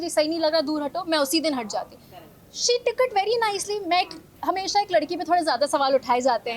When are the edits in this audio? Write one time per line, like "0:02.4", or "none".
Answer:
none